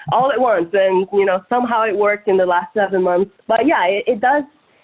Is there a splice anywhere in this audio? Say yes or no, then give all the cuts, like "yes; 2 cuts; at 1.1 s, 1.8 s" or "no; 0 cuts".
yes; 1 cut; at 3.4 s